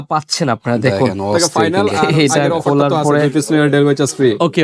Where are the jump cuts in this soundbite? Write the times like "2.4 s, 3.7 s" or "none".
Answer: 3.2 s